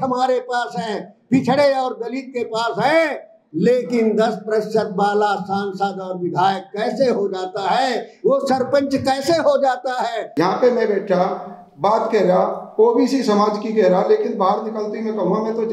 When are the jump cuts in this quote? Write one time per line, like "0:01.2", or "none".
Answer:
0:10.3